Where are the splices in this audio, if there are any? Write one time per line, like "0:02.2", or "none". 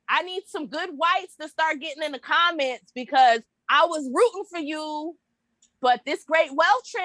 0:05.1